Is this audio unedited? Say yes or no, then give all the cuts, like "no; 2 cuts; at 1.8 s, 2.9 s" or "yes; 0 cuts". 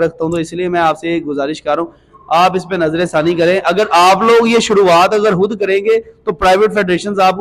yes; 0 cuts